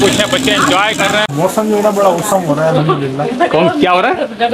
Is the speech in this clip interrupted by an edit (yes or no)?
yes